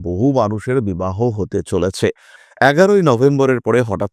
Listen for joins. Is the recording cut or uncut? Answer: cut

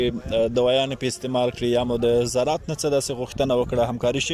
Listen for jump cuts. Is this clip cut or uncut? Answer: uncut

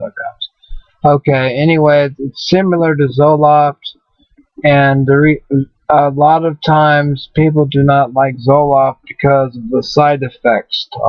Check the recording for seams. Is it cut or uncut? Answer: uncut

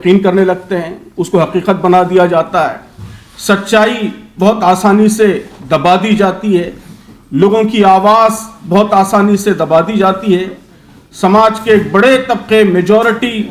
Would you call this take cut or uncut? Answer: uncut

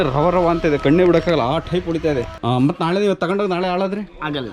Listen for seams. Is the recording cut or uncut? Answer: cut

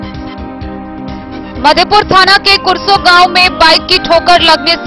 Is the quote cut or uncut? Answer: cut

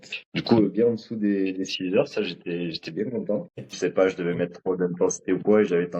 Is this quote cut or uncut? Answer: cut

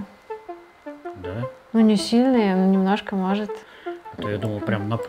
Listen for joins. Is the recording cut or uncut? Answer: cut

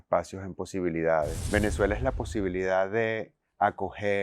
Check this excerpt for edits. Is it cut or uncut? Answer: cut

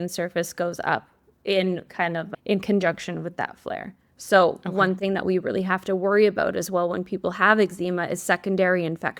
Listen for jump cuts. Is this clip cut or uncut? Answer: cut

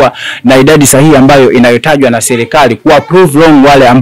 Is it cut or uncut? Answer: uncut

